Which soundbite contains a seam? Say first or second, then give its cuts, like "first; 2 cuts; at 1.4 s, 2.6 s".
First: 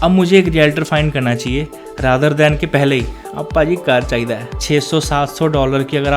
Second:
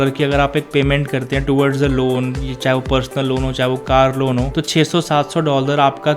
first; 1 cut; at 4.5 s